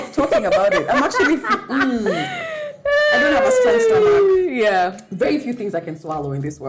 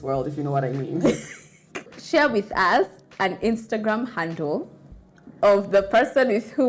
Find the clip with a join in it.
second; 1 cut; at 1.9 s

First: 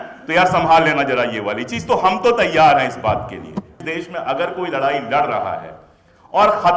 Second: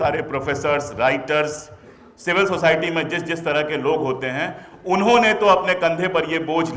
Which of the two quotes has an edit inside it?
first; 1 cut; at 3.8 s

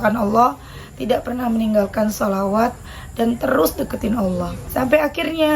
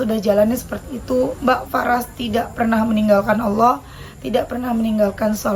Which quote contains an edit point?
first; 1 cut; at 4.6 s

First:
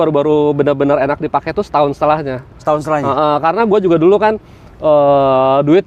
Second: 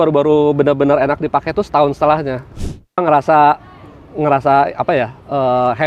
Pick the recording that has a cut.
second; 1 cut; at 2.5 s

